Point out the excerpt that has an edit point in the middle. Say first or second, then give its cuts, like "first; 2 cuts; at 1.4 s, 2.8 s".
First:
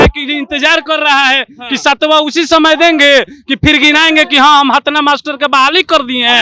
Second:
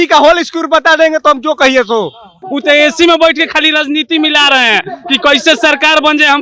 second; 1 cut; at 2.4 s